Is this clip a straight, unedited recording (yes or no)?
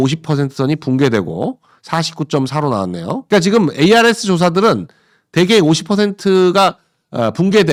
yes